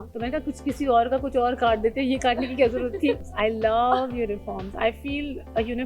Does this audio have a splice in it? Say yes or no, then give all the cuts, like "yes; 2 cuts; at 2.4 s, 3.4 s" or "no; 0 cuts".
yes; 1 cut; at 3.2 s